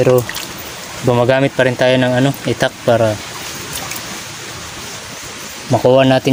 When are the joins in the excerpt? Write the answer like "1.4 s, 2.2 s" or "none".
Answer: none